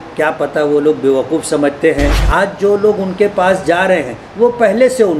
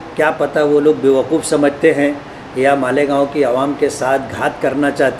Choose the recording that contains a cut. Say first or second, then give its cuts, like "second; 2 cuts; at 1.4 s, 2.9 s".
first; 1 cut; at 2.2 s